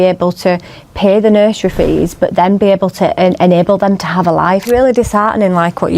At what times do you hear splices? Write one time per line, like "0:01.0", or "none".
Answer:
0:04.6